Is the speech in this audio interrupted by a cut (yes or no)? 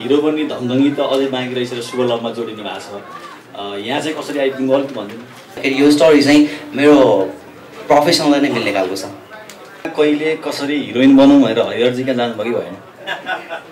yes